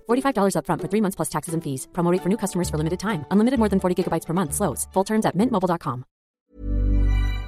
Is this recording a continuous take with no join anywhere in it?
no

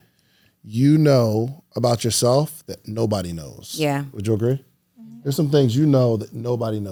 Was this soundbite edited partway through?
no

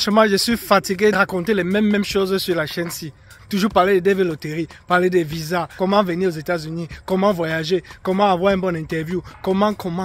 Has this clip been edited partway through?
yes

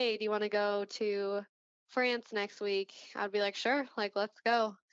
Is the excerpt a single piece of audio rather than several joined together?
yes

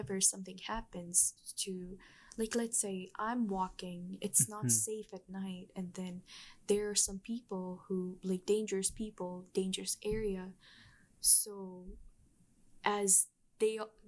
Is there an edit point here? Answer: no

